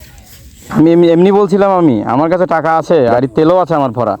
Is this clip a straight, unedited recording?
no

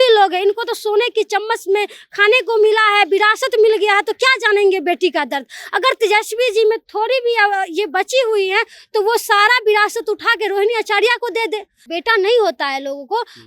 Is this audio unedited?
no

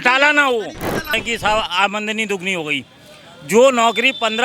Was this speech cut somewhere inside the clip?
yes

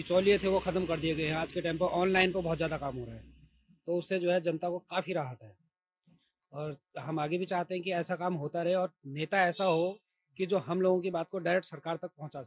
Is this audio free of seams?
yes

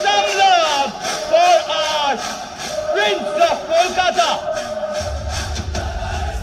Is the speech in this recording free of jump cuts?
yes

